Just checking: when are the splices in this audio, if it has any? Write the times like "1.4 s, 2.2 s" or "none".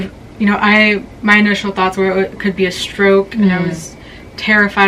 none